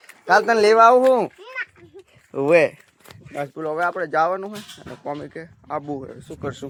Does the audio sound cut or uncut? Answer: uncut